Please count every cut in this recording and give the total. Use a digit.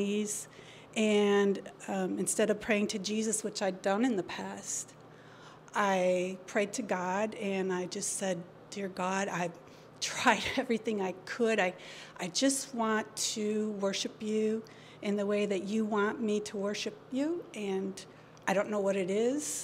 0